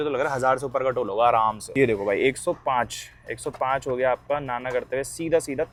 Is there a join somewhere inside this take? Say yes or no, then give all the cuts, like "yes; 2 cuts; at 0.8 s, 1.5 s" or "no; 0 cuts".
no; 0 cuts